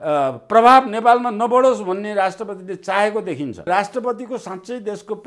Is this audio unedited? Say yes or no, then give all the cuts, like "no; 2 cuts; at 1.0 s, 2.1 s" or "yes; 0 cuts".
no; 1 cut; at 3.7 s